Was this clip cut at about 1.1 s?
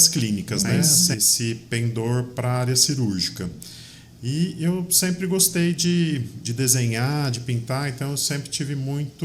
yes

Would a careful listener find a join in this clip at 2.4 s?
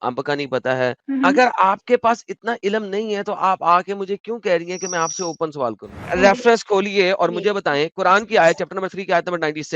no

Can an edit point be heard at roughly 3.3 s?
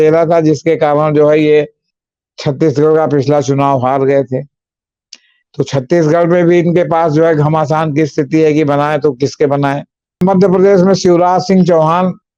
no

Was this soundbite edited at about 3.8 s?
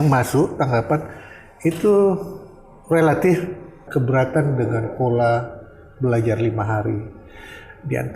yes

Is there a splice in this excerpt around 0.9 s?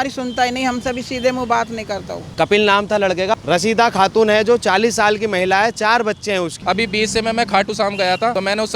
no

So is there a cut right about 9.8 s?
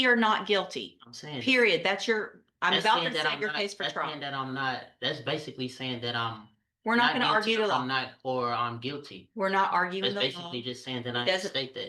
no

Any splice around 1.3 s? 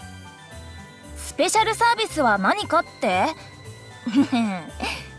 yes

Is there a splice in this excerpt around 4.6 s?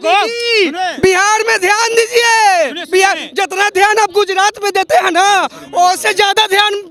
no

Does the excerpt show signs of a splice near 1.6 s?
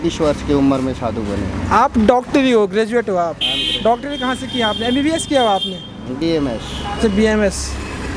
no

